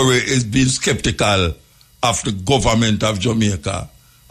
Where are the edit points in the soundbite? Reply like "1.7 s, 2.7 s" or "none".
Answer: none